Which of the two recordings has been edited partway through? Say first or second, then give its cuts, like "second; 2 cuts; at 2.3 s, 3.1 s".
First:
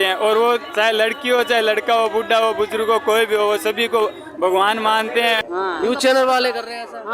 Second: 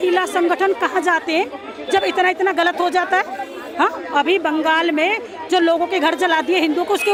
first; 1 cut; at 5.4 s